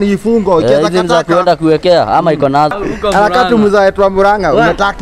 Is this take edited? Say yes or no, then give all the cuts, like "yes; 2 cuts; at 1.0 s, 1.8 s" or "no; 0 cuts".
yes; 1 cut; at 2.7 s